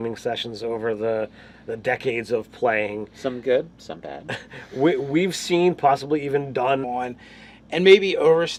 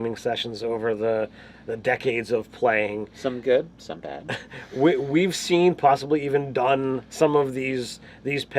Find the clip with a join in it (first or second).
second